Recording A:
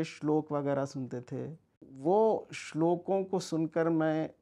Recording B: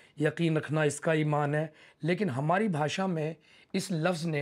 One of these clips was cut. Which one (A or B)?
A